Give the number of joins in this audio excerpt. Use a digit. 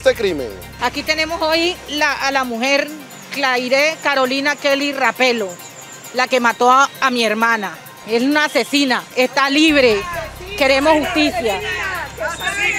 0